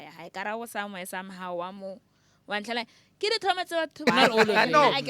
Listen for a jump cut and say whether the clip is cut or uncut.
cut